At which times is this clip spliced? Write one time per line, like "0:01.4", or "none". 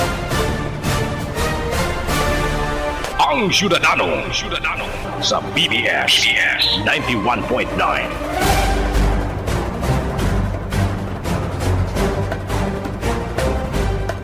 0:08.5